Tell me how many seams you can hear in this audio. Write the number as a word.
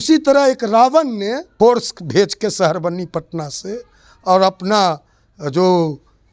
one